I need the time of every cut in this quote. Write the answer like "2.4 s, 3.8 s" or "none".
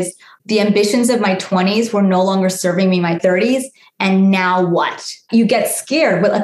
3.2 s, 5.1 s